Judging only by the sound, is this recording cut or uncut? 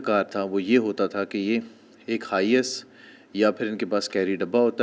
uncut